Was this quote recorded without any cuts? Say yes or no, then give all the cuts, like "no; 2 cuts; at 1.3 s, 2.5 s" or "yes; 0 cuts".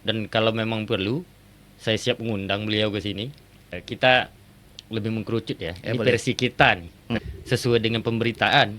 no; 2 cuts; at 3.8 s, 7.2 s